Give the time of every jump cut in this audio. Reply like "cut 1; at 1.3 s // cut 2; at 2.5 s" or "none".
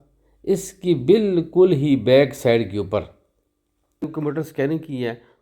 cut 1; at 4.1 s